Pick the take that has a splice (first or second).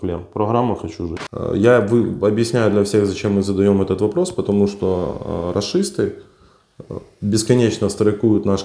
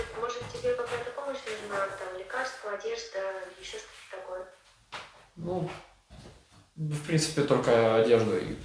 first